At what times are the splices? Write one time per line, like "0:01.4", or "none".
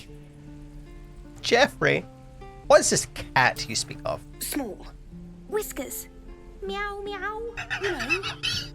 0:02.6